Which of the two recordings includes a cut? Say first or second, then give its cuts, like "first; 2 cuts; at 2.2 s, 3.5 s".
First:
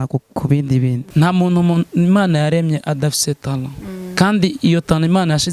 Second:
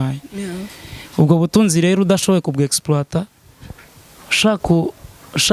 first; 1 cut; at 1.0 s